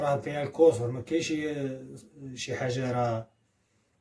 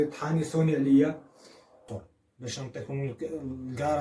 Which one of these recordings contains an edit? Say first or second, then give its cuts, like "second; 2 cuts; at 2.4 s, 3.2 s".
second; 1 cut; at 1.9 s